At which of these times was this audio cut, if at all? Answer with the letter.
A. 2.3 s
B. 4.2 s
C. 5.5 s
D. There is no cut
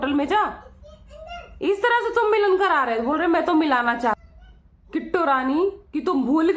B